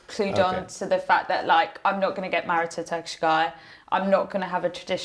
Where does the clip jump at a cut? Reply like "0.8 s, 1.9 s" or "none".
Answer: none